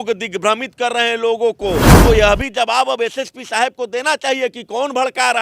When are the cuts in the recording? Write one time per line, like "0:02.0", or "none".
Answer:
0:01.9